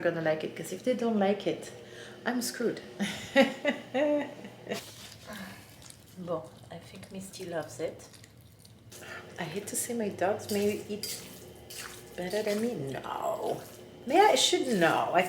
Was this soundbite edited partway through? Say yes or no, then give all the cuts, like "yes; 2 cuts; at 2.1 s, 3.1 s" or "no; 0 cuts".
yes; 2 cuts; at 4.9 s, 8.9 s